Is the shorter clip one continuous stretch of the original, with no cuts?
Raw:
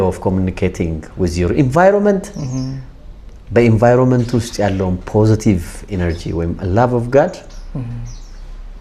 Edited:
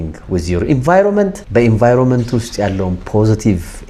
no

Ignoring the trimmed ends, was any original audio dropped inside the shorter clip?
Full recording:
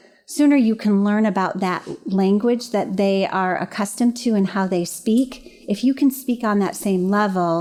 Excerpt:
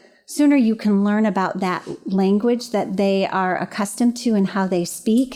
no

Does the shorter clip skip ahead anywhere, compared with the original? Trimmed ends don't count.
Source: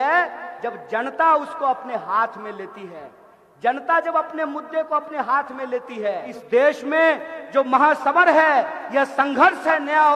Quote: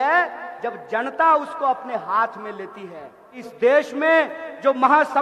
yes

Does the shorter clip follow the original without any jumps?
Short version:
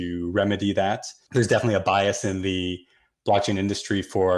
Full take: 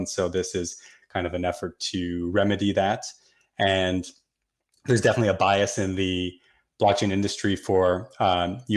no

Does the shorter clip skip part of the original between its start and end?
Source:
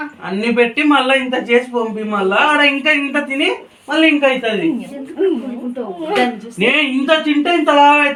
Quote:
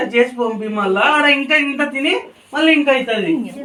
no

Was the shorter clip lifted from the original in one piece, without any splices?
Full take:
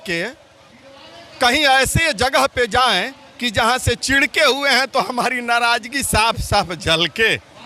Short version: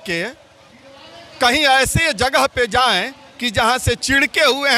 yes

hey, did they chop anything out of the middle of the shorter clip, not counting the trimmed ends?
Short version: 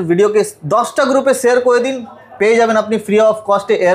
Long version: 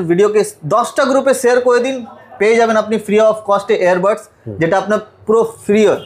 no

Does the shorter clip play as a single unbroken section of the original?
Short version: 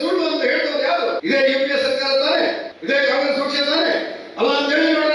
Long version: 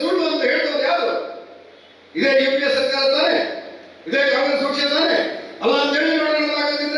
no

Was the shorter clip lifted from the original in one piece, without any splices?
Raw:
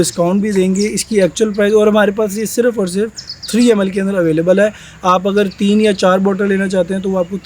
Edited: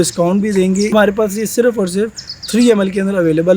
no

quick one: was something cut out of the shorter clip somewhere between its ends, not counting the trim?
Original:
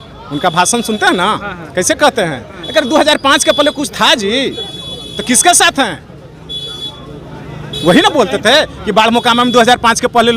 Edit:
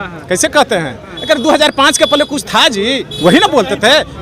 yes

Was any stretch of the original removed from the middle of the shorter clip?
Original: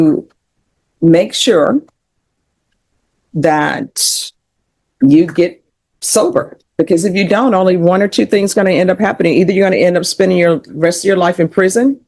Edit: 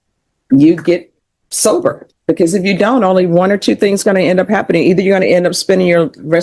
no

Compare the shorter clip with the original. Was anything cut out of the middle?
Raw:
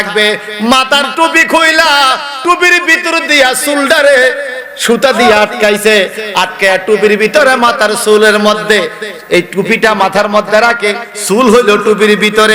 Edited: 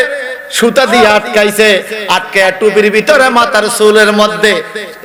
no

